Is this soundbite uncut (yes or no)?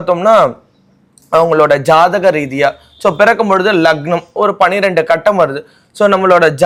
yes